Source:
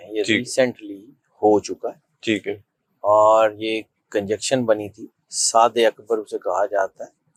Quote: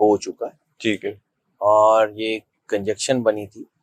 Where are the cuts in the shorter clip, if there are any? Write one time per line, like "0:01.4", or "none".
none